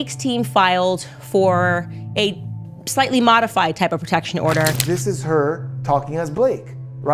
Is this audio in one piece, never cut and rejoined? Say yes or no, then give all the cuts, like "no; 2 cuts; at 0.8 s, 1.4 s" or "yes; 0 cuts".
no; 1 cut; at 4.8 s